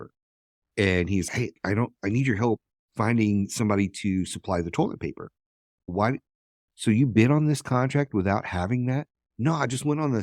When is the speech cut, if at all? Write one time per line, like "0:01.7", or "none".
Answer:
none